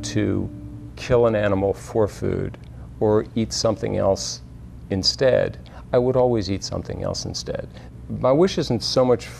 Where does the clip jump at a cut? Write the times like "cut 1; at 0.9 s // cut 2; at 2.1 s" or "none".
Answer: cut 1; at 7.8 s